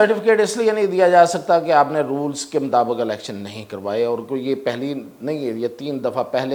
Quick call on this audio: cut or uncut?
uncut